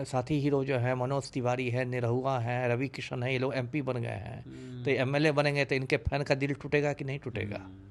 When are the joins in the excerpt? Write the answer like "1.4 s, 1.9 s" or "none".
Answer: none